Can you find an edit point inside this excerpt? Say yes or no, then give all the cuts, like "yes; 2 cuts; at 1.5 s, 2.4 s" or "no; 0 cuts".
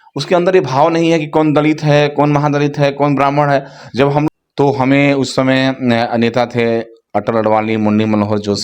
yes; 1 cut; at 4.3 s